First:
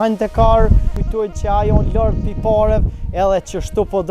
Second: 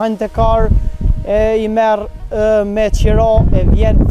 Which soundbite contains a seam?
first; 1 cut; at 1.0 s

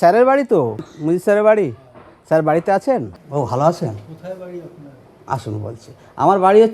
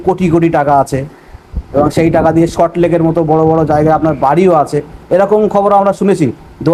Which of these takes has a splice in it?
first; 2 cuts; at 0.9 s, 3.2 s

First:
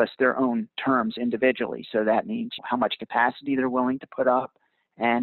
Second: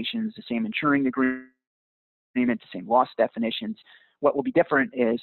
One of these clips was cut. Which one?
first; 1 cut; at 2.6 s

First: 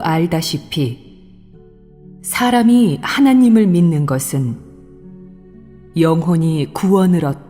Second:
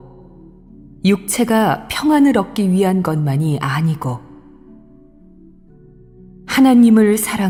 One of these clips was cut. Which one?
first; 1 cut; at 2.6 s

